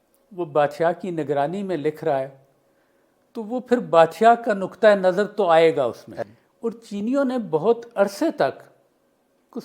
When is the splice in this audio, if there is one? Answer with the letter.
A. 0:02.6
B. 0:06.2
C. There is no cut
B